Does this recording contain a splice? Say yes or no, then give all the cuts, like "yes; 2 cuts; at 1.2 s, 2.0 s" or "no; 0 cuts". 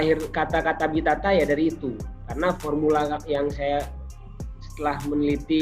no; 0 cuts